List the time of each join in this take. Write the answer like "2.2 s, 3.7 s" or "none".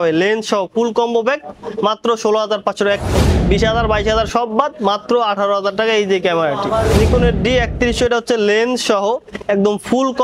3.2 s, 6.9 s